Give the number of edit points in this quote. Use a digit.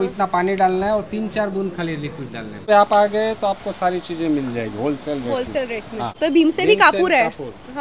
2